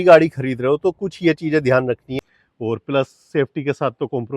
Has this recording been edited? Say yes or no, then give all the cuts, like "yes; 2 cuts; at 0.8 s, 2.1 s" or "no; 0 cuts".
yes; 1 cut; at 2.1 s